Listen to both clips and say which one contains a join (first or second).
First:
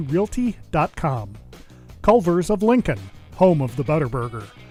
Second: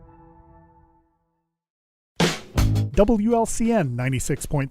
second